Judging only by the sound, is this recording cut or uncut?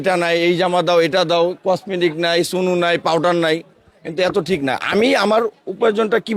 uncut